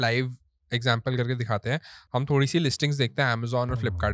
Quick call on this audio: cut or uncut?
uncut